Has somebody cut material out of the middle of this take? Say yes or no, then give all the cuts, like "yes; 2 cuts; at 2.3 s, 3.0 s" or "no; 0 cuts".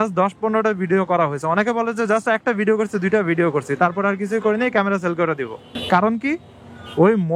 no; 0 cuts